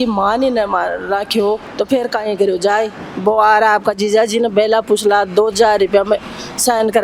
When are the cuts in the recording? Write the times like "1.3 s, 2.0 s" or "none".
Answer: 1.7 s